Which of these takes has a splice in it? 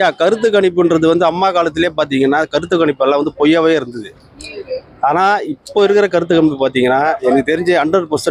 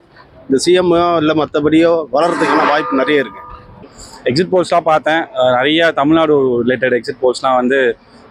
second; 1 cut; at 4.0 s

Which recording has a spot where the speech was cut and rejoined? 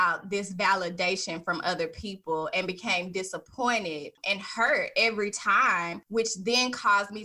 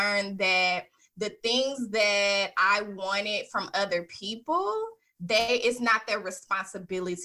first; 2 cuts; at 4.2 s, 6.0 s

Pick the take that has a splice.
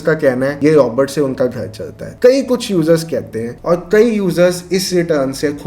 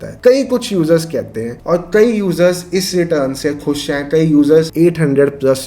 second; 1 cut; at 4.7 s

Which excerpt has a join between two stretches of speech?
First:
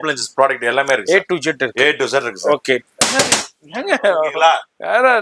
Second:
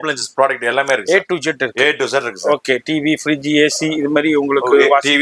first; 1 cut; at 2.8 s

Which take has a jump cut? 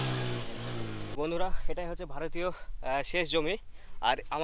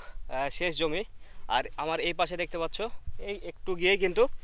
first; 1 cut; at 1.2 s

